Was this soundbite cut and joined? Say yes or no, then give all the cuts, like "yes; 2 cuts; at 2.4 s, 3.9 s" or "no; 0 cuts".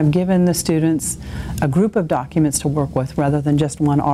no; 0 cuts